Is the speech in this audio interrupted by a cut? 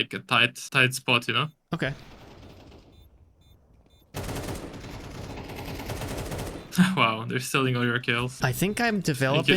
yes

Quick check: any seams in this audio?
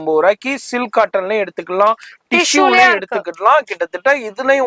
no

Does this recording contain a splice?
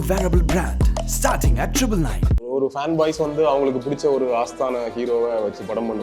yes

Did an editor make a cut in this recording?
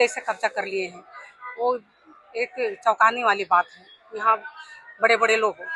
no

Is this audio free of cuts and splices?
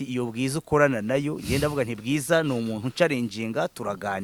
yes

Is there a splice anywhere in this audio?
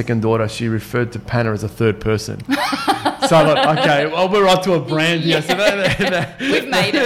no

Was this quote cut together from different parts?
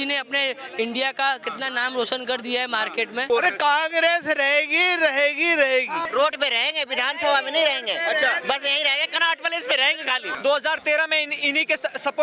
yes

